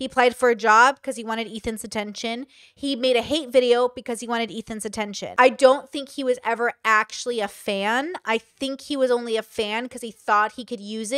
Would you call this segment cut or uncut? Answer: cut